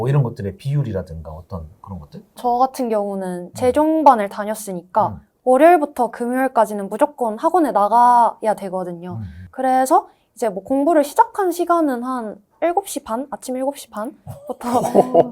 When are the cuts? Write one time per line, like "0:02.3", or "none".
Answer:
none